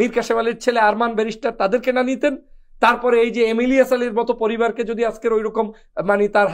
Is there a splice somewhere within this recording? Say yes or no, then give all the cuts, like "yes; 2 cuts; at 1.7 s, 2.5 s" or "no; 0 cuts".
no; 0 cuts